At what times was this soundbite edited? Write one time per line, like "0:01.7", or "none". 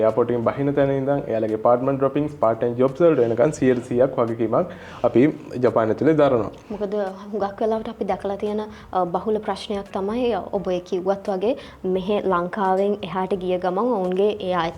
none